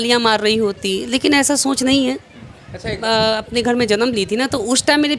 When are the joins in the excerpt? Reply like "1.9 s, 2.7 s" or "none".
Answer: 3.0 s